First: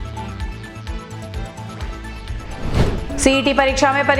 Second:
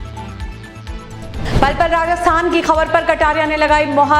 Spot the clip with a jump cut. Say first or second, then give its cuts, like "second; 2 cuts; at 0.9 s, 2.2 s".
first; 1 cut; at 0.9 s